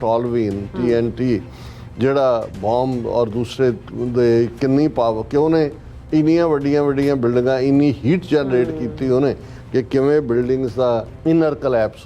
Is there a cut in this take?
yes; 1 cut; at 11.1 s

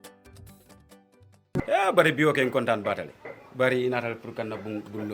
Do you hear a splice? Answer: yes; 1 cut; at 1.4 s

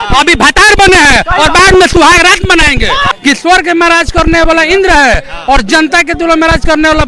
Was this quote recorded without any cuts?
no; 1 cut; at 3.1 s

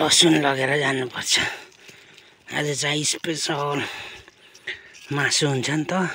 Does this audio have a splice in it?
no; 0 cuts

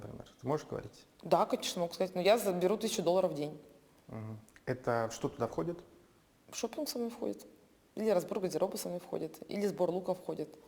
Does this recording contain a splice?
no; 0 cuts

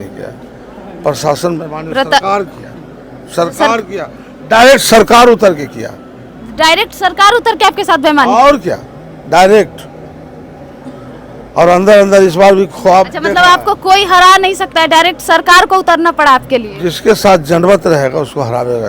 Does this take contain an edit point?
no; 0 cuts

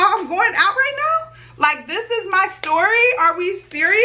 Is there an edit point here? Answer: no; 0 cuts

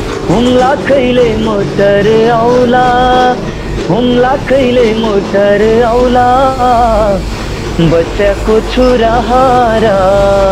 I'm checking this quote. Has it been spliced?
no; 0 cuts

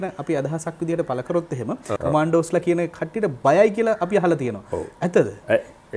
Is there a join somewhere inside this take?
yes; 1 cut; at 1.9 s

